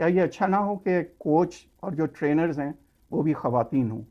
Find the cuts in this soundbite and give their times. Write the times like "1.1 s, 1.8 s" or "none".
none